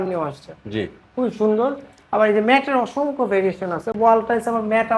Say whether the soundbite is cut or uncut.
uncut